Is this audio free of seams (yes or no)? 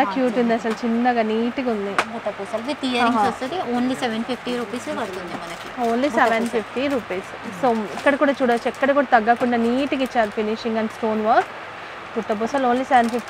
yes